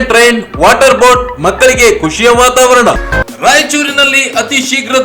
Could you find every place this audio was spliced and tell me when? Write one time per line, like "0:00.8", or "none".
0:03.0